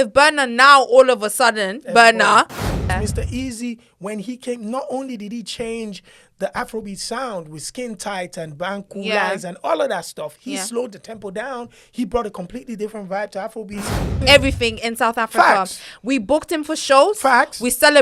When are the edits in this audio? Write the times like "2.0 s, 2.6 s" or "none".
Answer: 2.7 s, 14.2 s